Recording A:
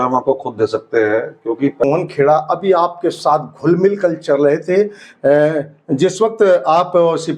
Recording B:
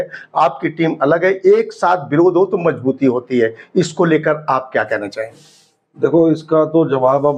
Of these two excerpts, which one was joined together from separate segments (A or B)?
A